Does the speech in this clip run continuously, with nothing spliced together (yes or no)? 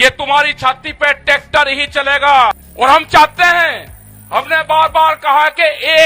no